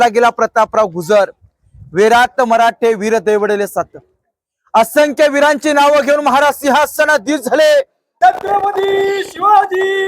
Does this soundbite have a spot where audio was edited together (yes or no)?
yes